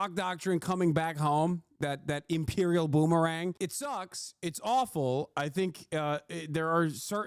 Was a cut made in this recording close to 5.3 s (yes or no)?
no